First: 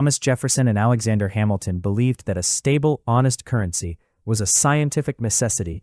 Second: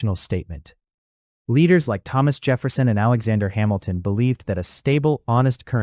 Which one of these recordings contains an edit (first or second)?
first